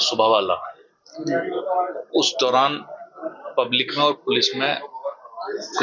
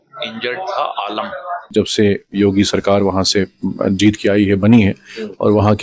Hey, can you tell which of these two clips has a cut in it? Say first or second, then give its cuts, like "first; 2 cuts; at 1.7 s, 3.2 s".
second; 1 cut; at 1.7 s